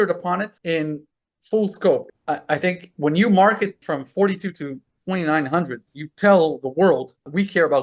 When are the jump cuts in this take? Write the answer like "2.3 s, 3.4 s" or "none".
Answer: 2.1 s